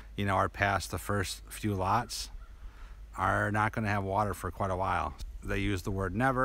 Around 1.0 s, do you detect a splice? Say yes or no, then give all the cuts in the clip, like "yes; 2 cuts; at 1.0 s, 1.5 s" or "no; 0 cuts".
no; 1 cut; at 5.2 s